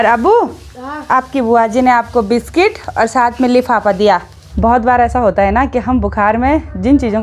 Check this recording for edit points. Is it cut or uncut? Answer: cut